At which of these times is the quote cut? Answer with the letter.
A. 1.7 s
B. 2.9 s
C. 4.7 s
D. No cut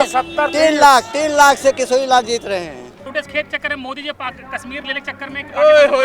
B